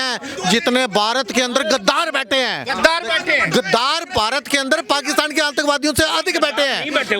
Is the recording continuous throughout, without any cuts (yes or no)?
yes